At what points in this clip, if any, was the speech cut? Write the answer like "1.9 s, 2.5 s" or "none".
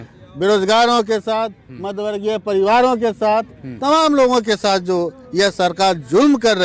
none